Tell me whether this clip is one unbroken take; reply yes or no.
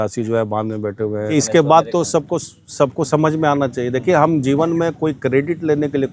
no